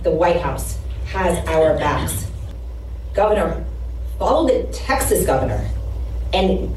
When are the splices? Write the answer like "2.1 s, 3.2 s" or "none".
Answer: none